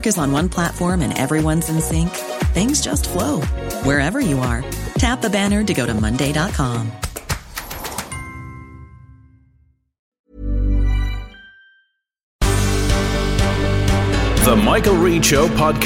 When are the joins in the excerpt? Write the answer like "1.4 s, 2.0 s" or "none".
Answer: 10.1 s, 12.3 s